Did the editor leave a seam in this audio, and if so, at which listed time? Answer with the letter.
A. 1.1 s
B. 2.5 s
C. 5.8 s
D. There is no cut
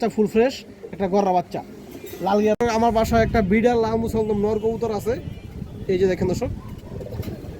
B